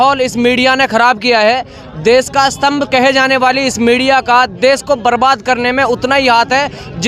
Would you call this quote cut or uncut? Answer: uncut